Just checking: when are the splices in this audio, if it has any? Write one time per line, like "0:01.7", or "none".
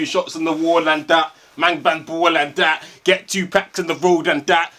none